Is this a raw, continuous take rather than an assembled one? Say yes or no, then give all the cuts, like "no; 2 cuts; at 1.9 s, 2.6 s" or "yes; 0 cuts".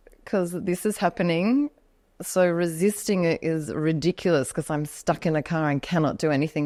yes; 0 cuts